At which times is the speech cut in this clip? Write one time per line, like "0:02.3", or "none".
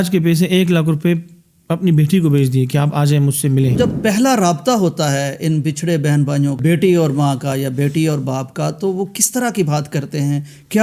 0:03.8
0:06.6